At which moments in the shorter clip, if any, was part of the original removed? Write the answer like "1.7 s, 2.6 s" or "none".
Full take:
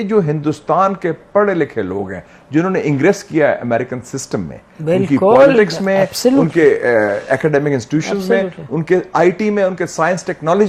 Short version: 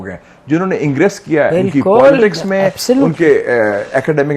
1.5 s